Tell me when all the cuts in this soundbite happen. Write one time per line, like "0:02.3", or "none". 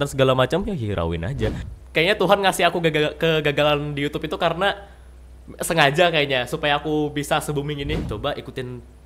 0:01.7
0:08.0